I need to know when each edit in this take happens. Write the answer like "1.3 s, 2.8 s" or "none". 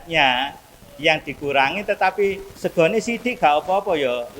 2.5 s